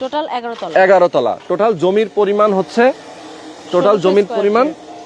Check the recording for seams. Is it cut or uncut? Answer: uncut